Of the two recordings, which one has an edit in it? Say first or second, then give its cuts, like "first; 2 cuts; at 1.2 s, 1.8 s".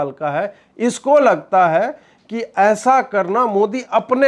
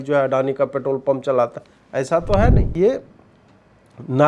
second; 1 cut; at 2.7 s